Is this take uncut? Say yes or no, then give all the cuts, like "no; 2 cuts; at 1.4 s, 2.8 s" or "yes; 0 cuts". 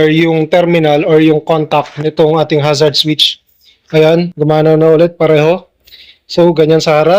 yes; 0 cuts